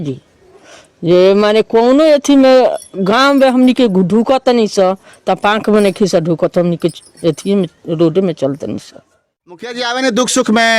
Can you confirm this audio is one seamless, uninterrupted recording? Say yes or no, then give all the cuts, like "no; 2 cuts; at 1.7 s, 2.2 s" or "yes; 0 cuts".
no; 1 cut; at 9.7 s